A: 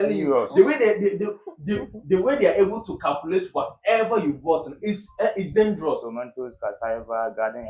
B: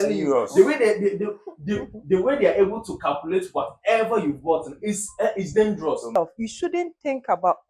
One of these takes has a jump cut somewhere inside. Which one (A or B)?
B